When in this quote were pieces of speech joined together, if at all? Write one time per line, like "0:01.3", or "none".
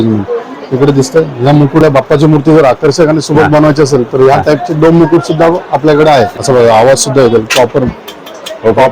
0:01.8
0:06.3